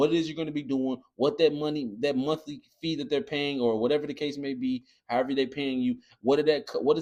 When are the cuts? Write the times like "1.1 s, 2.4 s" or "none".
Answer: none